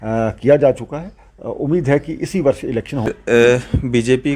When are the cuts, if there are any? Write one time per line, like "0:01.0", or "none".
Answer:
0:03.1

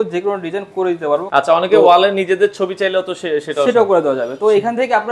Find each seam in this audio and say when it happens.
0:01.2

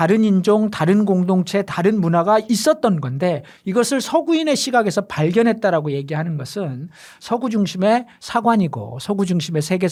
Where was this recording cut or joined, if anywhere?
none

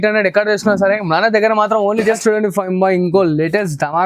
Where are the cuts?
0:02.2

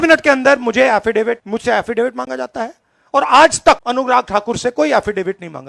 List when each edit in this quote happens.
0:01.4
0:03.8

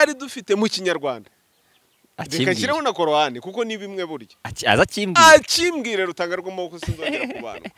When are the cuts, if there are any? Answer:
none

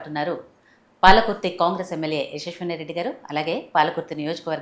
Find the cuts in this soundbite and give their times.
none

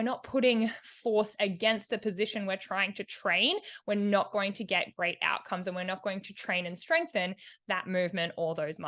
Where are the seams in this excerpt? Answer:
none

